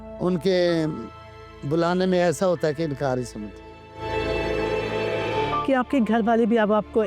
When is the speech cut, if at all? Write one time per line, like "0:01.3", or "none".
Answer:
0:05.4